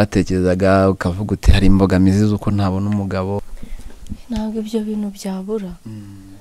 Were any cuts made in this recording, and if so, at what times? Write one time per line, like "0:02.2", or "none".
0:03.4